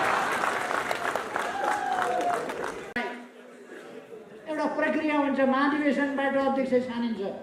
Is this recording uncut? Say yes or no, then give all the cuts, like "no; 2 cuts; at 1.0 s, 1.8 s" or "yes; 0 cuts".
yes; 0 cuts